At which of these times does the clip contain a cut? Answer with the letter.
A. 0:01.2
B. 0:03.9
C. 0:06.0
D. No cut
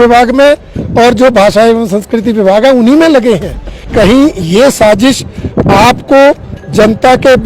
B